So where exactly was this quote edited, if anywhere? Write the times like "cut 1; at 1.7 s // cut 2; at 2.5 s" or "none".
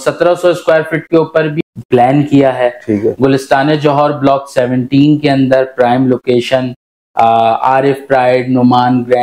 cut 1; at 1.5 s

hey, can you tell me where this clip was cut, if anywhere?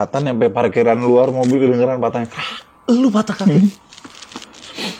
none

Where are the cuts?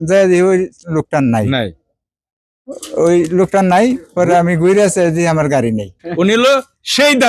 cut 1; at 6.0 s

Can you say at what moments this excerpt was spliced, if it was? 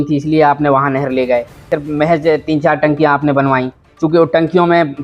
cut 1; at 1.6 s

